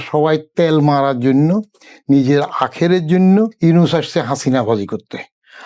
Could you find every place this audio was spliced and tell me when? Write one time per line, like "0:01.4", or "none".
0:03.5